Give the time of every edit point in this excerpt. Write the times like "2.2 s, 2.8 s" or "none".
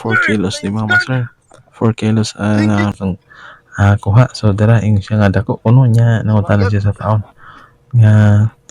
2.9 s